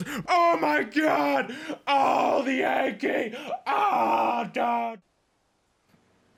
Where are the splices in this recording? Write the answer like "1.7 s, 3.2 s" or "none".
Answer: none